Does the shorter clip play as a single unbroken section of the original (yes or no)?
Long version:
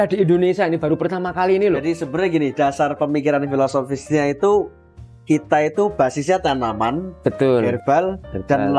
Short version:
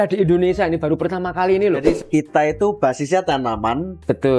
no